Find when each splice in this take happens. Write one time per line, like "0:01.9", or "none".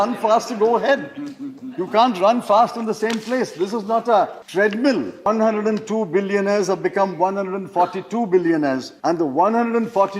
0:04.4
0:05.3
0:08.9